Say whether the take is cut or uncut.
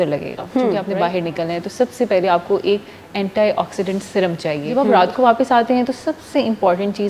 cut